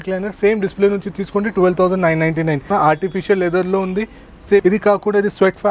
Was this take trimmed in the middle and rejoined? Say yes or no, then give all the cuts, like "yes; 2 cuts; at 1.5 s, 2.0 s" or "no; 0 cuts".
yes; 2 cuts; at 2.7 s, 4.6 s